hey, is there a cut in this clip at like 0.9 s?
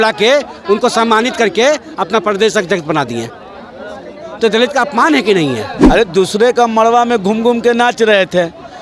no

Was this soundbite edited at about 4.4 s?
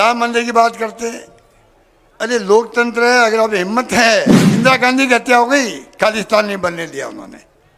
yes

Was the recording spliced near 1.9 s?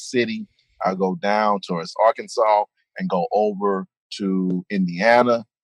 yes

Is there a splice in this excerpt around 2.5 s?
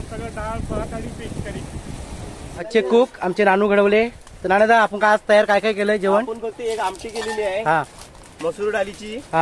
yes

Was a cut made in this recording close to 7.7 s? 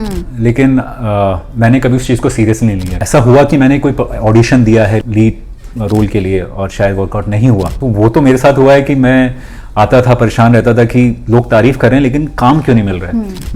yes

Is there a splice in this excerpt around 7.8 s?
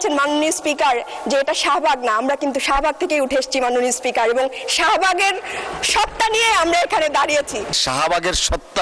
yes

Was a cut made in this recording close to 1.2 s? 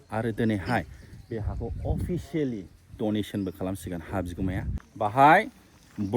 no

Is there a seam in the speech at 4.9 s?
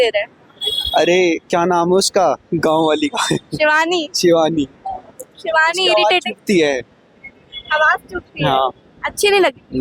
no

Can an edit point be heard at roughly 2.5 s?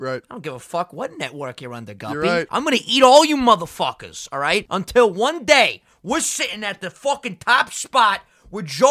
yes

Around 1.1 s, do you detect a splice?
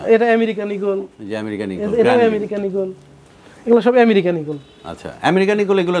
no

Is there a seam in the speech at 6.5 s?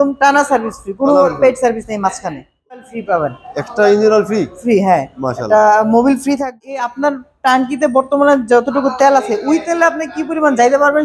yes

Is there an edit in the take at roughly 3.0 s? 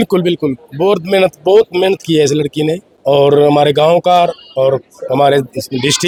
no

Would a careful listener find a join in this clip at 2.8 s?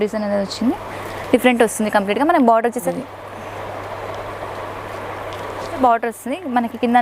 yes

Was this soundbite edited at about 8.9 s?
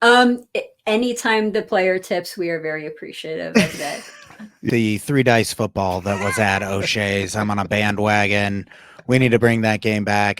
no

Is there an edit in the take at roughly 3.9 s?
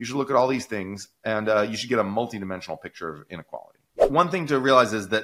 yes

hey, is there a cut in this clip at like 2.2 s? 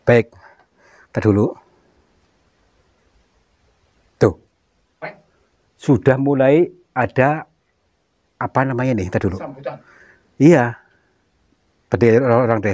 no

